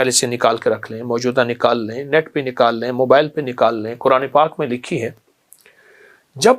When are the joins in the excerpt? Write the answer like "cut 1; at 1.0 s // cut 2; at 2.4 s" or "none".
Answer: none

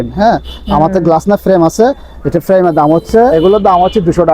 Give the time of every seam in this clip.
cut 1; at 3.3 s

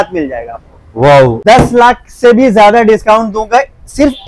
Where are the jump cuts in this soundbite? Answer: cut 1; at 1.4 s

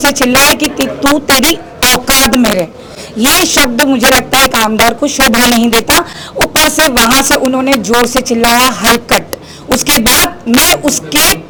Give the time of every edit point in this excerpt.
none

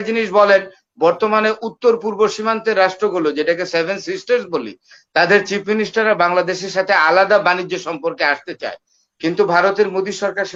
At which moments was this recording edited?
none

